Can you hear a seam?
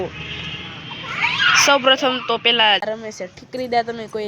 yes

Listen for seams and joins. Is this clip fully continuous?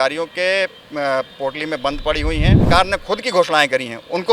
no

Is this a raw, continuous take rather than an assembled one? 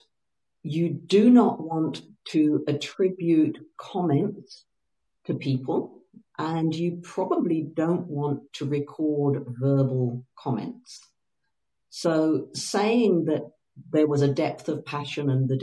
yes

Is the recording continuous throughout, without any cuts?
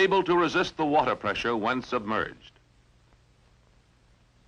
yes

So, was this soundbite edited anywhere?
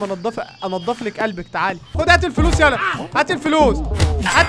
yes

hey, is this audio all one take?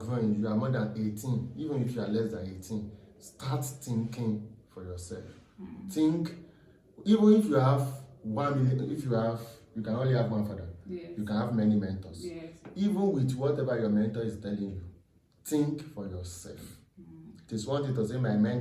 yes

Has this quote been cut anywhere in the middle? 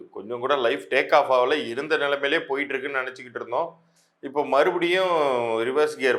no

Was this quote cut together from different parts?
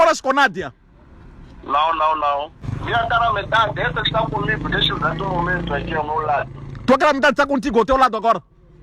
yes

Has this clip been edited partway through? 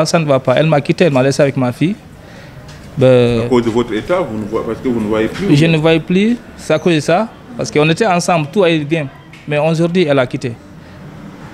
no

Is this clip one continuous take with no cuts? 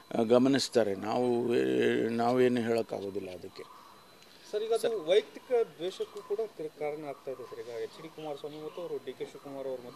yes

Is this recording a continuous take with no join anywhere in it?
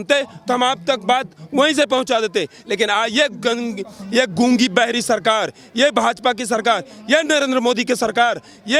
yes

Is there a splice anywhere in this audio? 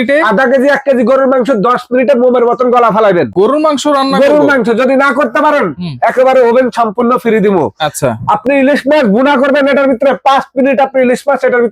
no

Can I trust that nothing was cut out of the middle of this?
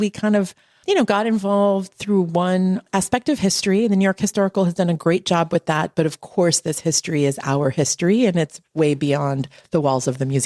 yes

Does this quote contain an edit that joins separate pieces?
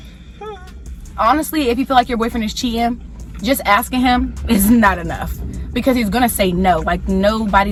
no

